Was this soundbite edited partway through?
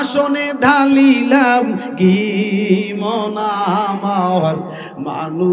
no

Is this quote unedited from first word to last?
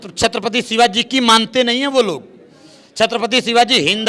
yes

